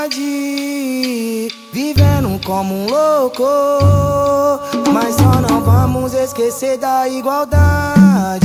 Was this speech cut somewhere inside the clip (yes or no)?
yes